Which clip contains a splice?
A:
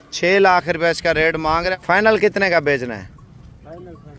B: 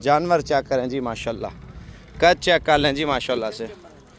A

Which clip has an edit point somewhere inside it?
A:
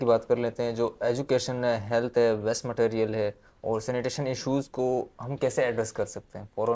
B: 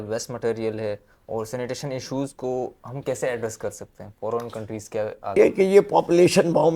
B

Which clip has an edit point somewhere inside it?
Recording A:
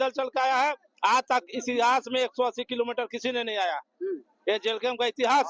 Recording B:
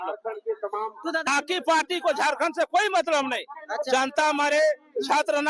B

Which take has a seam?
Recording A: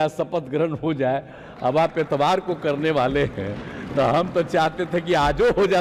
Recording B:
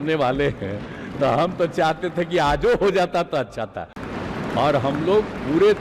B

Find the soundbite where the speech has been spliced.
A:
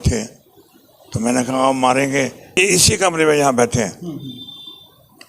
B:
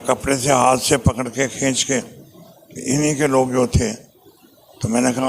A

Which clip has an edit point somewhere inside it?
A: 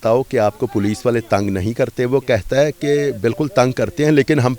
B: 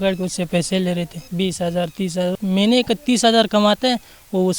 B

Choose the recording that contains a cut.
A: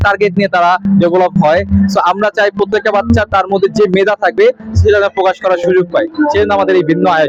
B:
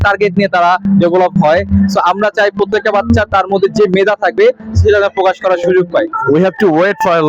B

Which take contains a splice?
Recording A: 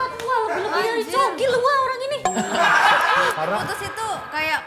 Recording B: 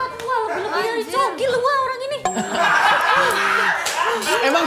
A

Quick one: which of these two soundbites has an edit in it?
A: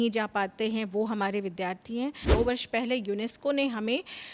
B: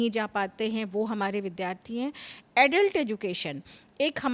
A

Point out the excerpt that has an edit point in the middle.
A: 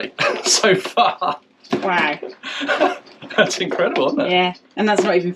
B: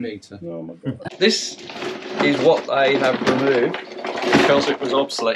B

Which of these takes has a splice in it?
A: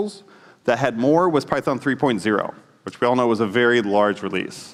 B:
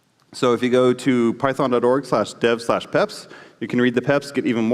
B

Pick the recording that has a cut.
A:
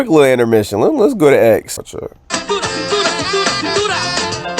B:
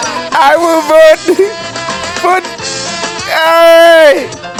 A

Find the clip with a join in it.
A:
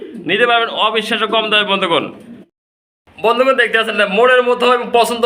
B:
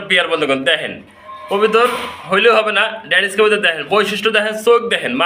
A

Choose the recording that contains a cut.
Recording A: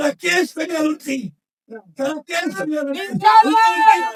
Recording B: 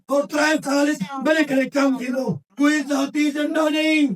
B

